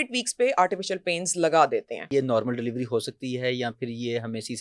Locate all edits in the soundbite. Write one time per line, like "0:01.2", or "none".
0:02.0